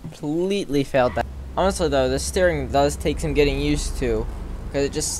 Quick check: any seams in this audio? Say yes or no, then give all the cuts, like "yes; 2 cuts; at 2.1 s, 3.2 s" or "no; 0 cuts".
yes; 1 cut; at 1.2 s